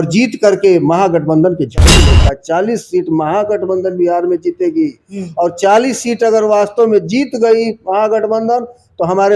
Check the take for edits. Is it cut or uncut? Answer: cut